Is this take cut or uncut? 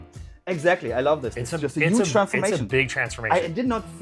cut